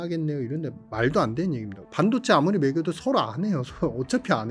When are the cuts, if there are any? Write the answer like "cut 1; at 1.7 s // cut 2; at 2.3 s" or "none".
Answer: cut 1; at 1.8 s